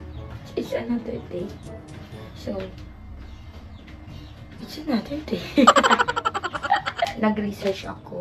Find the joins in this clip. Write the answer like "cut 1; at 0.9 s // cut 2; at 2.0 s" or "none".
cut 1; at 7.1 s